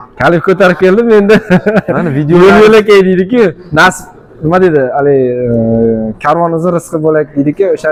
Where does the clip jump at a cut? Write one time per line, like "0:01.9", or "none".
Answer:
none